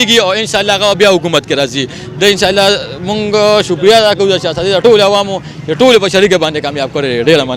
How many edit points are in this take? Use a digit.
0